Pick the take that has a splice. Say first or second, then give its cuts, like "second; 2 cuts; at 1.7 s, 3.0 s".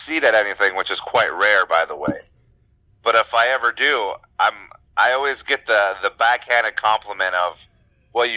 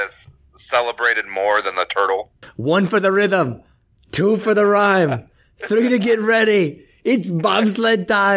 second; 1 cut; at 2.4 s